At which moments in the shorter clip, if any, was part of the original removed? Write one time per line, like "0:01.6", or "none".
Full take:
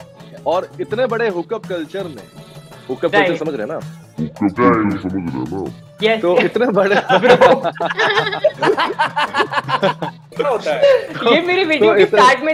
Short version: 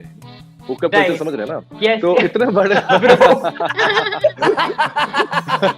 0:01.6